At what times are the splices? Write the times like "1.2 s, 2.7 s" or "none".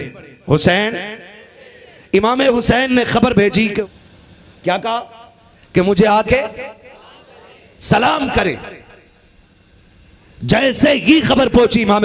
3.8 s